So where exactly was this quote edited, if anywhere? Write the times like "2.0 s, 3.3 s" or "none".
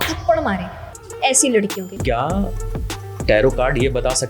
2.0 s